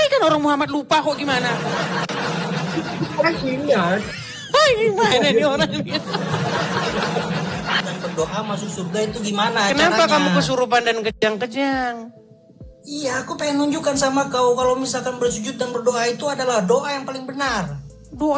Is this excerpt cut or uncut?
cut